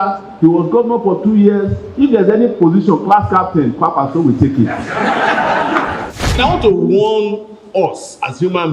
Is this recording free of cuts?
no; 1 cut; at 6.3 s

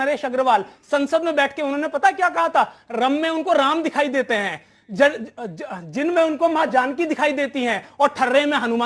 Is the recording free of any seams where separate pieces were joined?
yes; 0 cuts

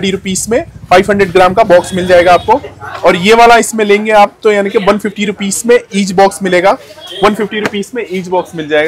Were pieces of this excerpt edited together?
no; 0 cuts

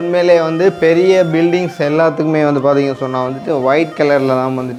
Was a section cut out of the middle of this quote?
no; 0 cuts

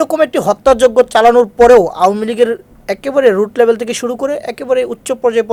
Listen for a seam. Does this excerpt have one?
no; 0 cuts

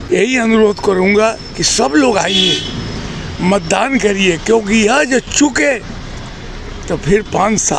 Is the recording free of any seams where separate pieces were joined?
yes; 0 cuts

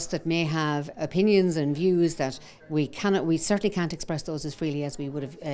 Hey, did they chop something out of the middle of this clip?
yes; 1 cut; at 0.9 s

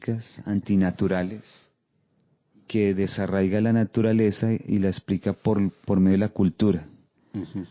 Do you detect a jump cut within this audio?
no; 0 cuts

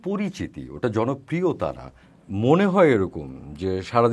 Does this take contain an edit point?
yes; 1 cut; at 1.9 s

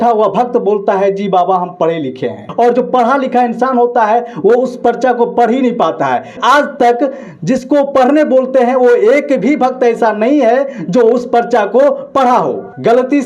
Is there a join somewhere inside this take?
yes; 2 cuts; at 2.4 s, 6.4 s

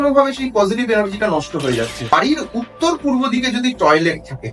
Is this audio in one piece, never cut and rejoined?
no; 1 cut; at 2.1 s

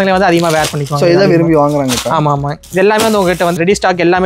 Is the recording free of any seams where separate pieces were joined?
no; 1 cut; at 2.6 s

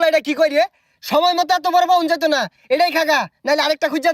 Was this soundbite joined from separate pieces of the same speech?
no; 0 cuts

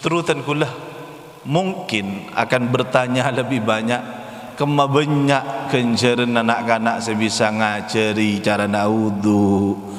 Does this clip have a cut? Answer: no; 0 cuts

